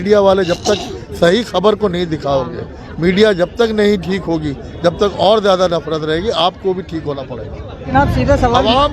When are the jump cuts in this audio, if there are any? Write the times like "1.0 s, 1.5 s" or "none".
7.7 s